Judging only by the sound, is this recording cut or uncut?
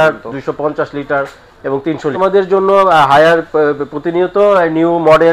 cut